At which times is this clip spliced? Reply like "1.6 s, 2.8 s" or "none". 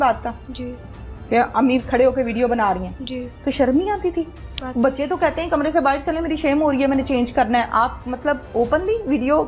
none